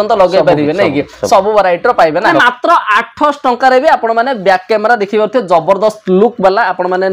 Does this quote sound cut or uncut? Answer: cut